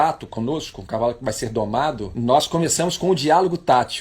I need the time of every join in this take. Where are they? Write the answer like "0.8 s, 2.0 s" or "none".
2.1 s